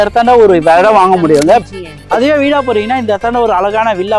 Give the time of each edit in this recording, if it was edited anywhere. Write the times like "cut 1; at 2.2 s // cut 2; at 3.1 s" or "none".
cut 1; at 1.6 s